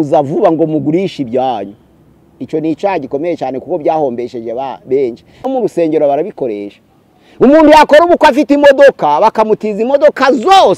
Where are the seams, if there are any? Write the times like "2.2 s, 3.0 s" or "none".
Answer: 5.5 s